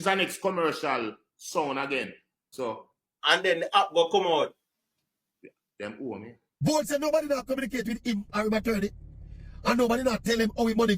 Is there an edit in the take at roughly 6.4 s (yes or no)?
yes